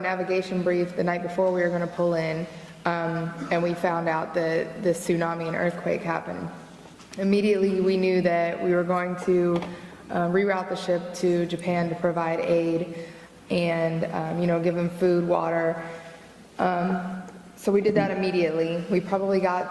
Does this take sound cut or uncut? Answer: cut